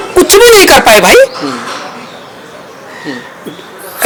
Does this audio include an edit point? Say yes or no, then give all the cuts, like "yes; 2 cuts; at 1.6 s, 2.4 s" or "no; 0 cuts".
no; 0 cuts